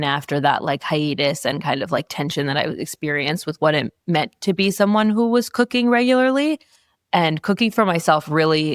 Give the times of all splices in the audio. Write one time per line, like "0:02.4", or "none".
none